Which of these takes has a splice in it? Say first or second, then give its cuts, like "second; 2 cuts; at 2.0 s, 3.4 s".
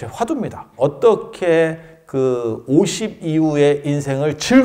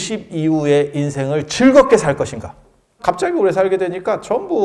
second; 1 cut; at 3.0 s